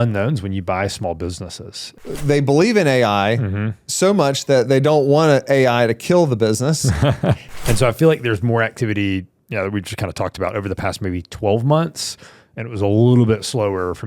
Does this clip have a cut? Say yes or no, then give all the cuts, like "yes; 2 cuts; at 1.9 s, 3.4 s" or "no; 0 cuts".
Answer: yes; 2 cuts; at 1.9 s, 7.5 s